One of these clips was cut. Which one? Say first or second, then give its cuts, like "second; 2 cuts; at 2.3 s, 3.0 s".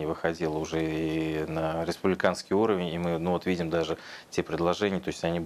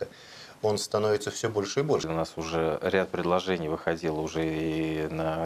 second; 1 cut; at 2.1 s